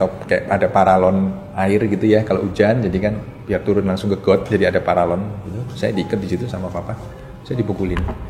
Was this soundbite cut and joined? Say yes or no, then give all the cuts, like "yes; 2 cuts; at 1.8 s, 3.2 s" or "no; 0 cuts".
yes; 2 cuts; at 1.4 s, 3.3 s